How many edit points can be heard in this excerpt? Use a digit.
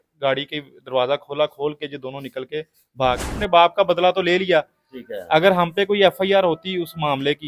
1